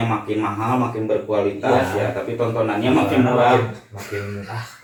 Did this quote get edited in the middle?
no; 0 cuts

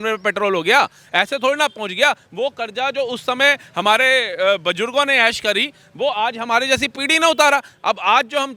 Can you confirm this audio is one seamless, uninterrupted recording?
yes; 0 cuts

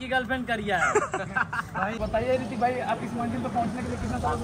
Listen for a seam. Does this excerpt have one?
yes; 1 cut; at 2.0 s

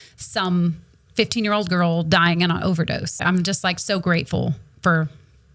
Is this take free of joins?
no; 1 cut; at 3.2 s

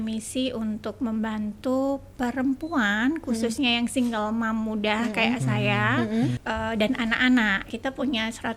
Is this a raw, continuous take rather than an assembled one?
no; 2 cuts; at 6.4 s, 7.6 s

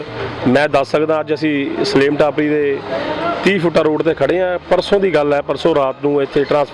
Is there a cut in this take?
no; 0 cuts

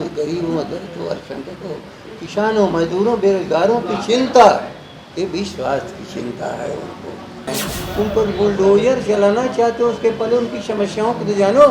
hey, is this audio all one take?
no; 1 cut; at 7.5 s

